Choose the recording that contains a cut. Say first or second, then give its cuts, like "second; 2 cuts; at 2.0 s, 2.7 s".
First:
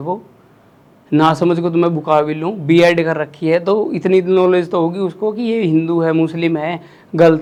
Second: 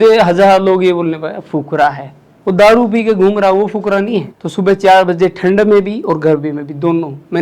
second; 1 cut; at 4.4 s